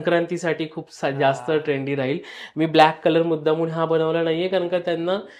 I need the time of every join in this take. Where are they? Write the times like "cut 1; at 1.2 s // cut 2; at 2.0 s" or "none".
none

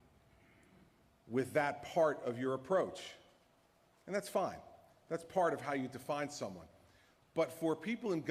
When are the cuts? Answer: cut 1; at 4.0 s

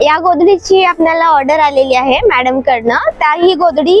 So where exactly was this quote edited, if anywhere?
none

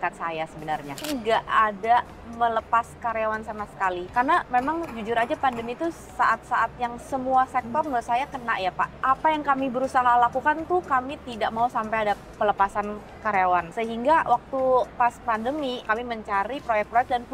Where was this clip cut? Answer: cut 1; at 1.0 s

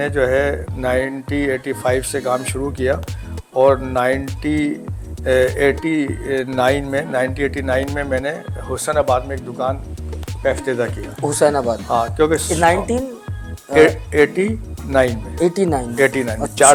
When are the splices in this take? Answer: none

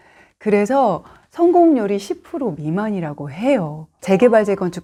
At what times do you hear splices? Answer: none

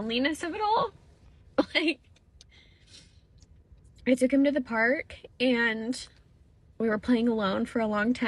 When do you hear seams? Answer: none

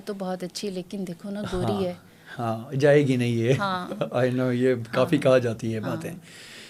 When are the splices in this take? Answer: none

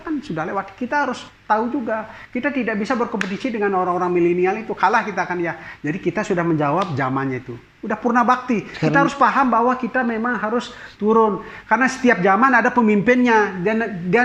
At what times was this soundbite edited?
none

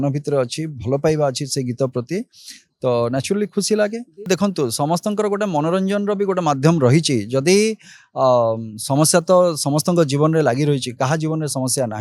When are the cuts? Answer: cut 1; at 4.3 s

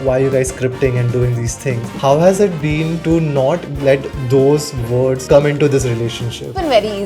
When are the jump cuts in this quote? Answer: cut 1; at 2.0 s

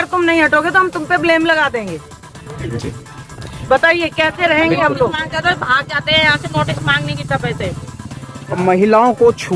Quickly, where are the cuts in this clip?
none

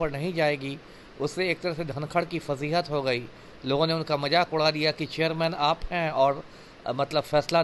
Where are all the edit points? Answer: none

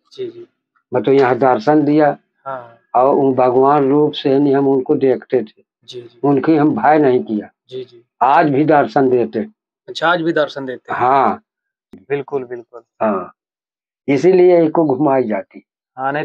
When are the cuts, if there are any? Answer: cut 1; at 12.0 s

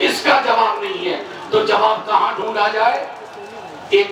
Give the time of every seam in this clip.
none

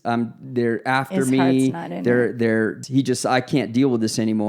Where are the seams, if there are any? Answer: cut 1; at 2.8 s

